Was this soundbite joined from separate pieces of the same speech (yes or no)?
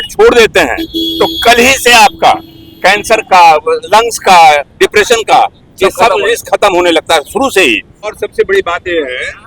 yes